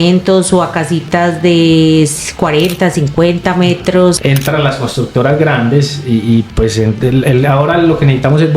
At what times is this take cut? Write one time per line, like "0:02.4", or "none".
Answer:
0:04.2